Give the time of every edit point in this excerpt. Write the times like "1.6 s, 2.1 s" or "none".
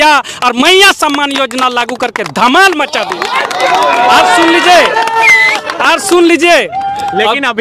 none